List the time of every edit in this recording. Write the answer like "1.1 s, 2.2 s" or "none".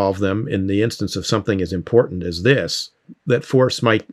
3.1 s